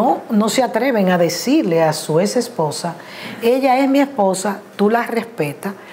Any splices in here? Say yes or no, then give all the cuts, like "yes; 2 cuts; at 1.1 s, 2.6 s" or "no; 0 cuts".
no; 0 cuts